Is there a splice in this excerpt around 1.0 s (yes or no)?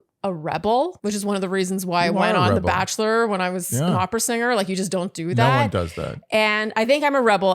yes